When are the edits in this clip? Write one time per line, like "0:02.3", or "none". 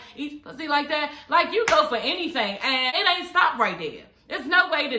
0:03.0